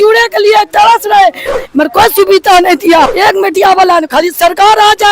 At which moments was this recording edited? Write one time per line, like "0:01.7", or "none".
0:01.5
0:03.1

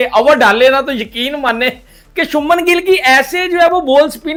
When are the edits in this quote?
none

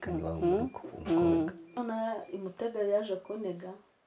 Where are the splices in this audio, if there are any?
0:01.7

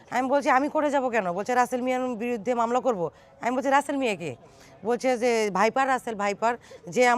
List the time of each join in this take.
none

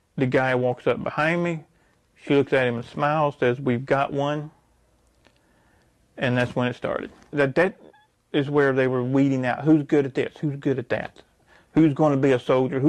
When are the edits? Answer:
0:07.3

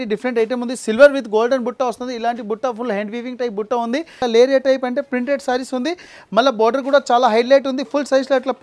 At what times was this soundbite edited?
0:04.2

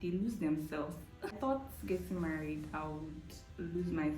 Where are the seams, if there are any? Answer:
0:01.4

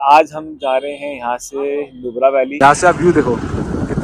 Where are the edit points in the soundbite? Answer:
0:02.5

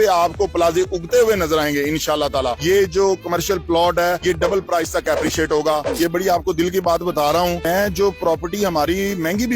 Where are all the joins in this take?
0:02.5
0:05.8
0:07.6

